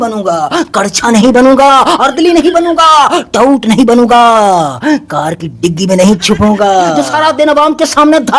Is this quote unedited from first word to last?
no; 1 cut; at 7.0 s

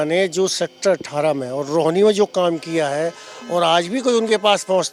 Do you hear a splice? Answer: no; 0 cuts

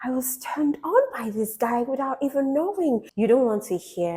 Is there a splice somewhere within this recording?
yes; 1 cut; at 3.1 s

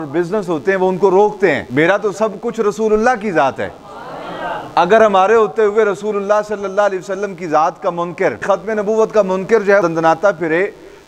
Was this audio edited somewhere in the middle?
yes; 3 cuts; at 1.6 s, 8.4 s, 9.8 s

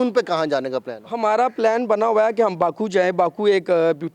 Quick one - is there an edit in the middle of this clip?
no; 0 cuts

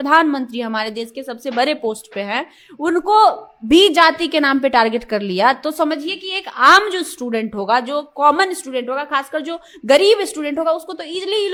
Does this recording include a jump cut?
no; 0 cuts

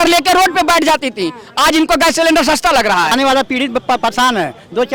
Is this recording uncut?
no; 1 cut; at 3.1 s

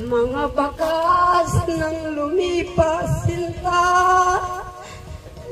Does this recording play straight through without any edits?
yes; 0 cuts

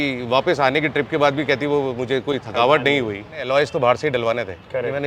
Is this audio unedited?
no; 1 cut; at 3.4 s

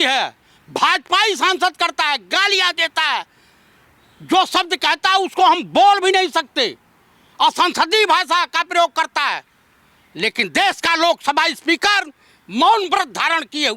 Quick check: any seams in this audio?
no; 0 cuts

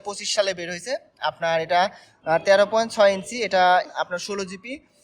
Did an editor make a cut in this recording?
yes; 1 cut; at 3.9 s

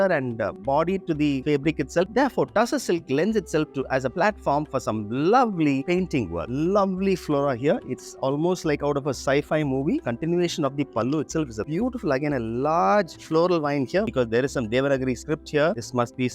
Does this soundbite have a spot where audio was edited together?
yes; 4 cuts; at 2.1 s, 6.5 s, 10.1 s, 14.1 s

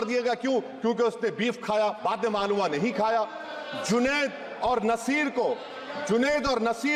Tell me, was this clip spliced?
no; 0 cuts

